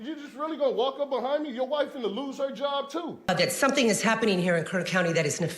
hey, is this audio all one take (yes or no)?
no